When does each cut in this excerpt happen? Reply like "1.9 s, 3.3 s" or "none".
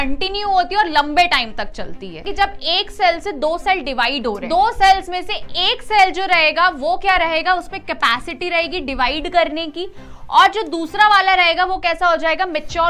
2.2 s, 4.4 s

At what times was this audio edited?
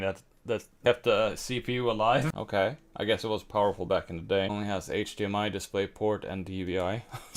2.3 s

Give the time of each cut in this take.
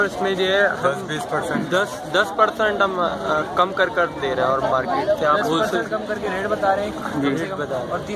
none

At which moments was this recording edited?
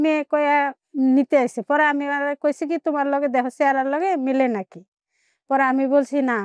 none

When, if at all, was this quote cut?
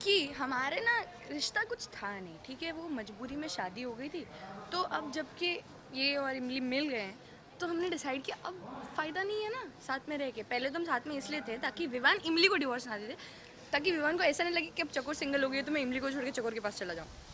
none

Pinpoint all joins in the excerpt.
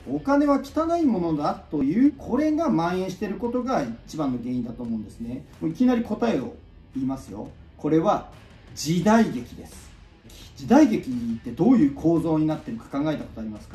1.8 s, 5.5 s, 7.5 s, 10.3 s

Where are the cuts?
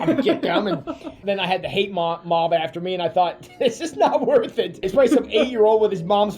4.9 s

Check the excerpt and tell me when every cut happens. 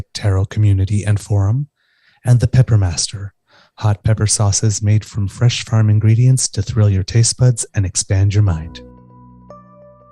8.7 s

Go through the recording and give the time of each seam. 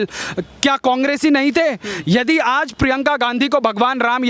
none

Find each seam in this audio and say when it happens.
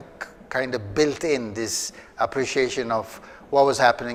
none

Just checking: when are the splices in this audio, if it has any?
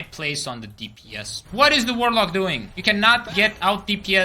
1.3 s

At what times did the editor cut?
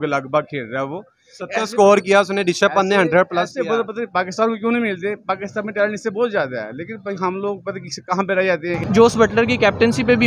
8.8 s

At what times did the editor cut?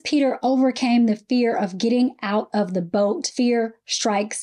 3.3 s

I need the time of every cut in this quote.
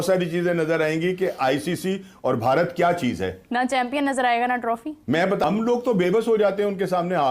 5.4 s

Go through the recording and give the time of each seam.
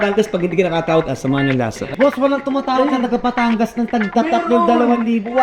1.9 s

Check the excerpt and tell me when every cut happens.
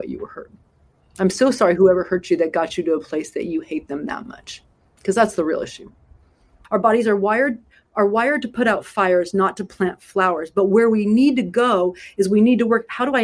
6.5 s

